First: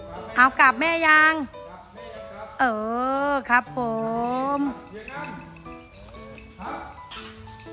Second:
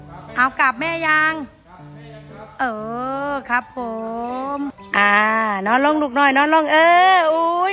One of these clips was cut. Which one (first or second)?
second